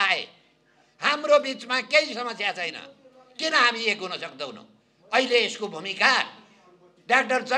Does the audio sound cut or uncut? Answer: uncut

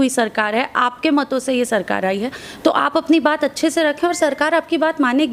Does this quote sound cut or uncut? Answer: uncut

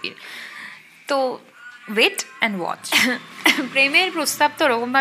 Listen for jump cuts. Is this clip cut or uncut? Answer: cut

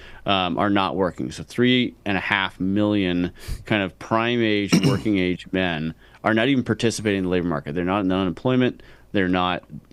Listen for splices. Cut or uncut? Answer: uncut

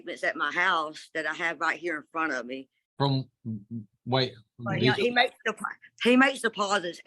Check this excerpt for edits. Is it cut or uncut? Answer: cut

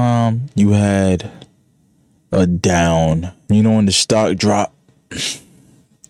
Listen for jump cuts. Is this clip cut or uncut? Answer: cut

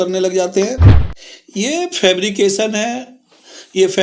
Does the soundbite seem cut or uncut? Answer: cut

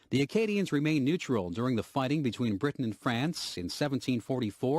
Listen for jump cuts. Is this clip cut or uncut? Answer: cut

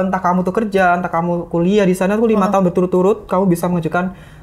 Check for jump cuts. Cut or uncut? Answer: uncut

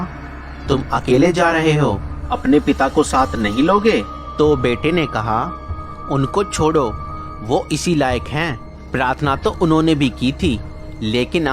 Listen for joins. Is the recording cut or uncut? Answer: uncut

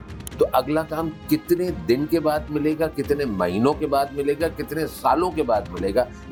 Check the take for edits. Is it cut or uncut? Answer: uncut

